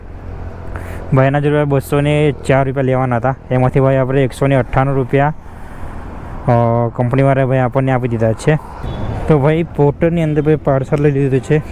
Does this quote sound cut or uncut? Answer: cut